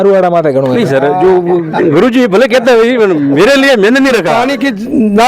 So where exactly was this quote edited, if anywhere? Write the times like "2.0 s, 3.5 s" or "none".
4.3 s